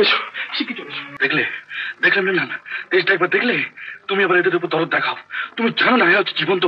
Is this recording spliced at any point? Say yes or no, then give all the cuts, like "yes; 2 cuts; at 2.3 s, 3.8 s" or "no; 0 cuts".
yes; 1 cut; at 1.1 s